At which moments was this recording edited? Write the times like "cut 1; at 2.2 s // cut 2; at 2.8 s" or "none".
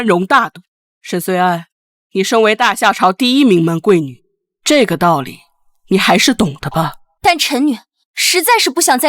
cut 1; at 7.0 s